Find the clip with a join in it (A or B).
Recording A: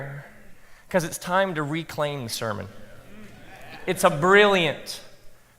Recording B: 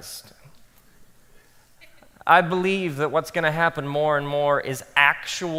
A